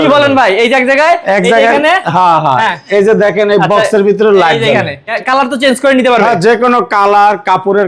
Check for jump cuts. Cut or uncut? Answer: cut